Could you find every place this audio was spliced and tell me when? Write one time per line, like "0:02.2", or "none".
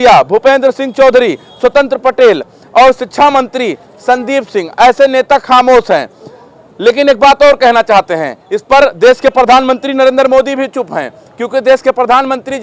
none